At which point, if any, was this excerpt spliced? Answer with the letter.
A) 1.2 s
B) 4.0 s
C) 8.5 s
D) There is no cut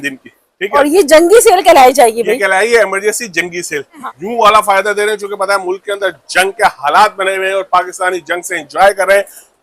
B